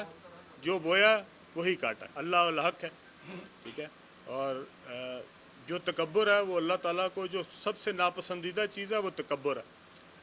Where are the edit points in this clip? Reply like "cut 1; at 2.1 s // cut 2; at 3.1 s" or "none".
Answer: cut 1; at 2.1 s

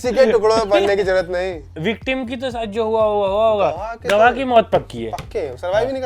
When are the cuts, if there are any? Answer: cut 1; at 1.7 s

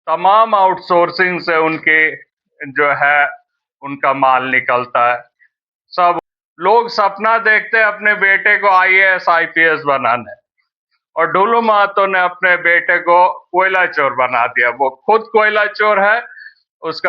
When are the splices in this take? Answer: cut 1; at 6.2 s

